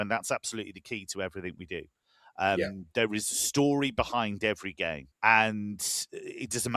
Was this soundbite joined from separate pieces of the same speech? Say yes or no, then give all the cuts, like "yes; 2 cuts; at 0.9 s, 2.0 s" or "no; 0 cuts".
yes; 1 cut; at 5.1 s